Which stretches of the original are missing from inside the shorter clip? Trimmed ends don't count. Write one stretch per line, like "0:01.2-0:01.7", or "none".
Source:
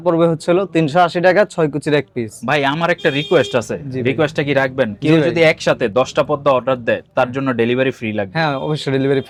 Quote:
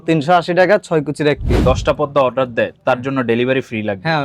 0:02.3-0:05.9